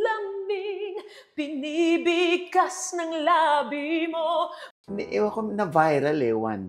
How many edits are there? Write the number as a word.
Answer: one